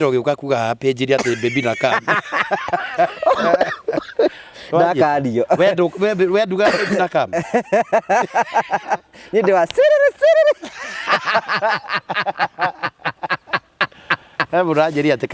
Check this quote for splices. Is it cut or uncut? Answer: uncut